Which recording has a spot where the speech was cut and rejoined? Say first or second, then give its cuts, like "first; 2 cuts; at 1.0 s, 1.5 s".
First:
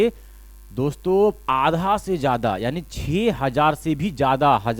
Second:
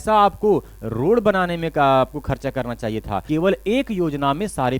second; 1 cut; at 3.2 s